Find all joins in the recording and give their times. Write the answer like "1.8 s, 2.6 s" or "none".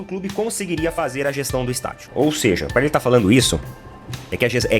2.0 s